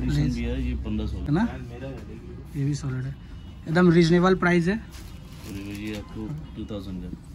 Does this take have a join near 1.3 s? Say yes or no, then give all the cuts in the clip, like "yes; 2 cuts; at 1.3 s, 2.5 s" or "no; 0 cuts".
yes; 1 cut; at 1.3 s